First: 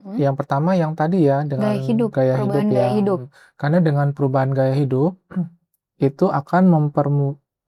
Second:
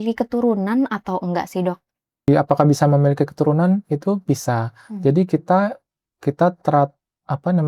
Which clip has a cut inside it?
second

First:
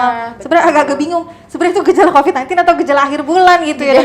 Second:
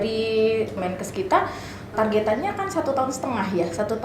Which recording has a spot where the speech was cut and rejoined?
second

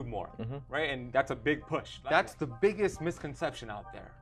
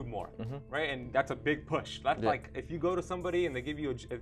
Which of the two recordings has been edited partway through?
first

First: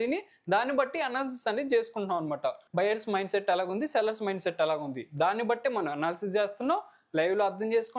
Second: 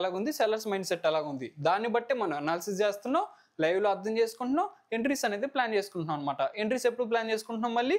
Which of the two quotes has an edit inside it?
first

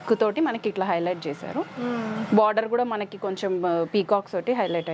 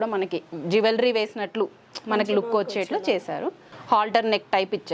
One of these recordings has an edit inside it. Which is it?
second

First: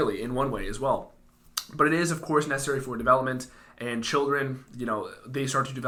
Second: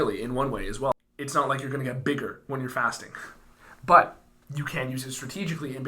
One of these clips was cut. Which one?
second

